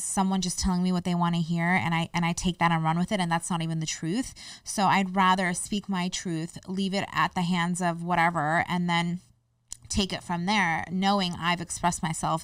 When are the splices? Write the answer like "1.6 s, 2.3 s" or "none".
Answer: none